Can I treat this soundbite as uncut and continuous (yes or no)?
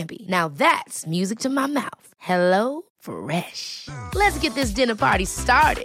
yes